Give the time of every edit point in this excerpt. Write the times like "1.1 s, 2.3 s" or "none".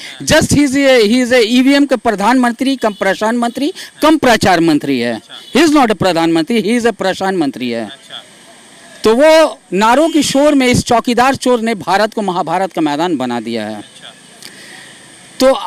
none